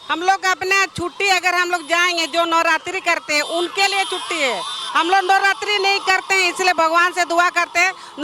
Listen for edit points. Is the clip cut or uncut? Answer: uncut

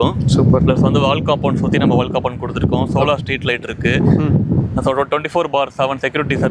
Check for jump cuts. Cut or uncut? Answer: uncut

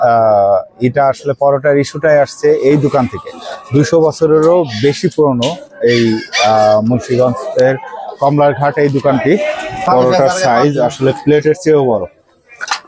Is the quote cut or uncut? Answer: cut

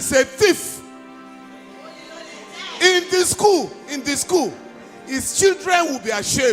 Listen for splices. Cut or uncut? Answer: uncut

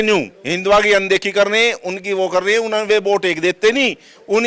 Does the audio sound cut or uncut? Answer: uncut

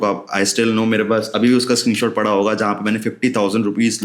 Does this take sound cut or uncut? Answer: uncut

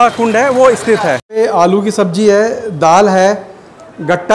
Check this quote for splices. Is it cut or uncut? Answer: cut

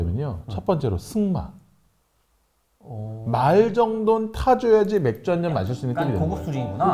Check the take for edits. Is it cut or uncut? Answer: uncut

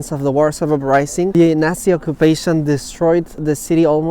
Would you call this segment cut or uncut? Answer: cut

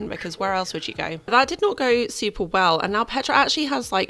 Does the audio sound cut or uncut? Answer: cut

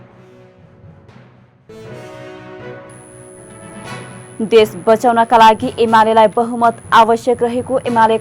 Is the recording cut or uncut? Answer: cut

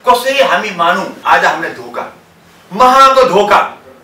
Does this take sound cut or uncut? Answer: cut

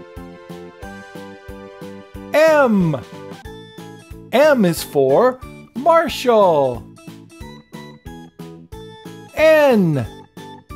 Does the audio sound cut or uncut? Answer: uncut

